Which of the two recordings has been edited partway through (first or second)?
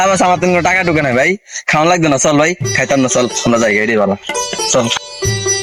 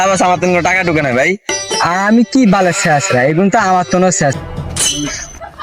second